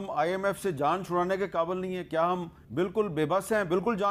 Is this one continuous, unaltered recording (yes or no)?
no